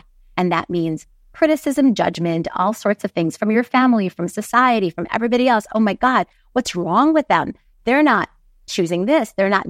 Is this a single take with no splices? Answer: yes; 0 cuts

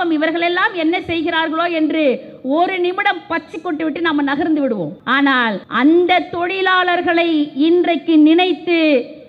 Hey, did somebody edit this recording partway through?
yes; 1 cut; at 5.3 s

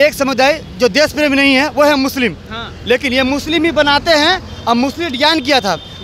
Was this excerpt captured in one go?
yes; 0 cuts

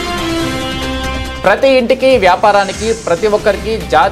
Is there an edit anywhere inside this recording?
yes; 1 cut; at 1.0 s

